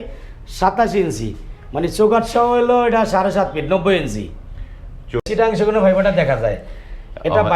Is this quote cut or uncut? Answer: cut